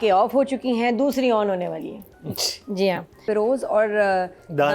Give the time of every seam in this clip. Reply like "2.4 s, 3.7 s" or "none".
3.2 s